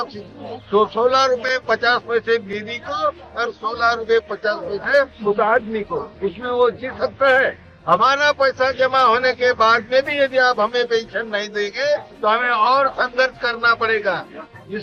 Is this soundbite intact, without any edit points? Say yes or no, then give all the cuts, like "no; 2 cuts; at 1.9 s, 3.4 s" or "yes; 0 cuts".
yes; 0 cuts